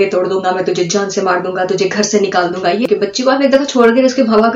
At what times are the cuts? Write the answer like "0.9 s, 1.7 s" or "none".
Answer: 2.8 s

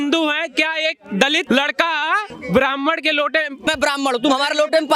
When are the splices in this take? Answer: 1.4 s, 2.3 s, 3.7 s

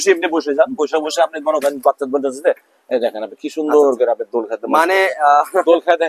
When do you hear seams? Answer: none

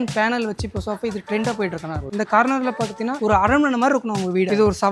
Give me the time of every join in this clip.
2.0 s

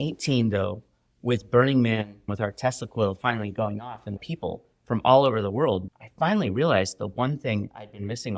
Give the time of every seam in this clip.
2.3 s, 4.2 s, 5.9 s

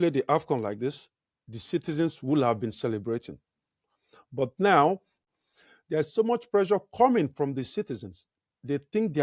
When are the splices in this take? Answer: 5.1 s

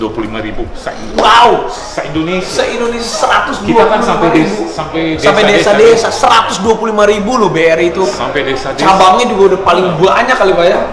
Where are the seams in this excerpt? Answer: none

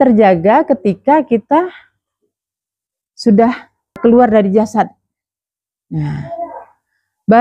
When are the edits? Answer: 4.0 s

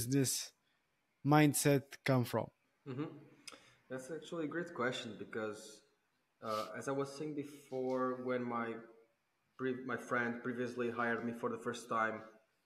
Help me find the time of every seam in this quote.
2.7 s

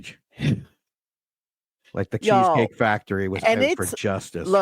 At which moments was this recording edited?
2.2 s

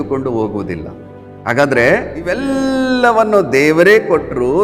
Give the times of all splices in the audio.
2.4 s

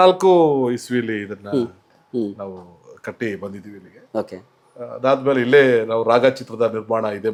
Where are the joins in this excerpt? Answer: none

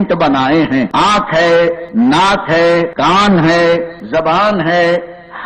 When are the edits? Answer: 0.9 s, 1.8 s, 2.9 s, 4.0 s

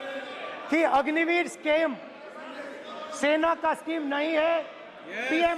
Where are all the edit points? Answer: none

